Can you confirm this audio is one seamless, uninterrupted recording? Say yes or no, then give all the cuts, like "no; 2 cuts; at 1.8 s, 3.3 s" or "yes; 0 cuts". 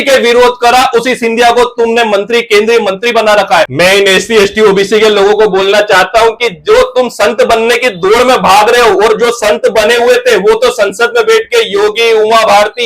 no; 1 cut; at 3.7 s